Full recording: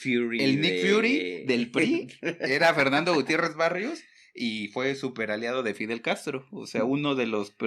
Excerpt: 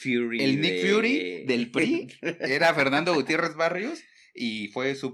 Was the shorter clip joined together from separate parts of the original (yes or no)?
no